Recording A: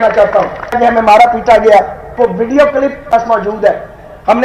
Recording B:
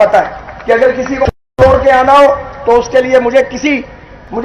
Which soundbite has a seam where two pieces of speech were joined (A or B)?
A